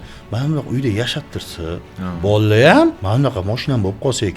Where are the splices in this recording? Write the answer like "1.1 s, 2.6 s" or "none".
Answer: 1.9 s, 3.0 s